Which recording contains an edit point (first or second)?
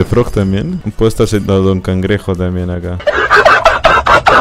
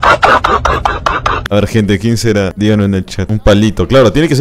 second